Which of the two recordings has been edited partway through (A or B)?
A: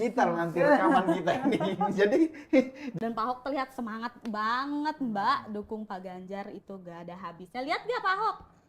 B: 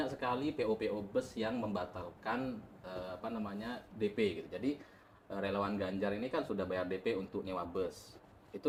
A